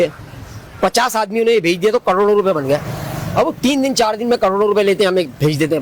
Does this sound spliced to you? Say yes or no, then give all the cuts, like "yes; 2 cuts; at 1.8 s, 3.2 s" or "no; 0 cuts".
no; 0 cuts